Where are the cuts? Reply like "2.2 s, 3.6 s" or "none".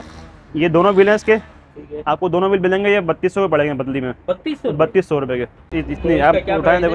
5.8 s